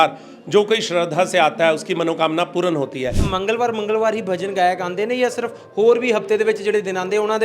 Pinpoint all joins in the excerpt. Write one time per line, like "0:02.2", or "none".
0:03.2